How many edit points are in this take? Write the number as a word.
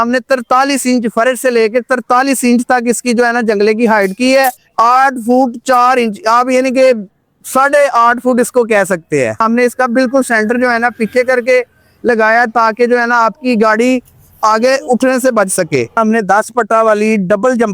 three